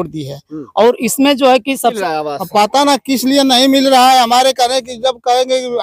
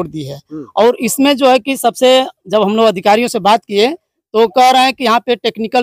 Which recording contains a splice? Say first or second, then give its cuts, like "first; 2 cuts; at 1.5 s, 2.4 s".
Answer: first; 1 cut; at 2.0 s